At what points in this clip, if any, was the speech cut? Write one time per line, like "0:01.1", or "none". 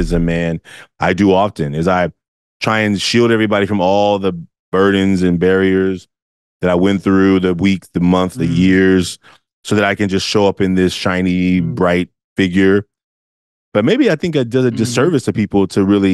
0:08.3
0:12.2